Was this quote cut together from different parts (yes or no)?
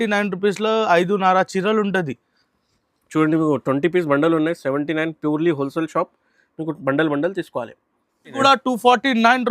yes